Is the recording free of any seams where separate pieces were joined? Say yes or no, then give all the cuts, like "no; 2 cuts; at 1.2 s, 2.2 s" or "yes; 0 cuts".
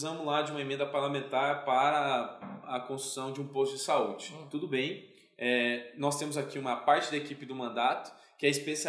no; 1 cut; at 4.4 s